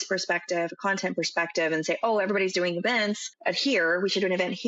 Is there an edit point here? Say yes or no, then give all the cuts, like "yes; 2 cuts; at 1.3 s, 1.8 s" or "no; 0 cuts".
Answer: yes; 1 cut; at 3.3 s